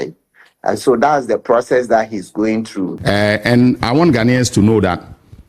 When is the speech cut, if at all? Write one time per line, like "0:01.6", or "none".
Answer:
0:02.8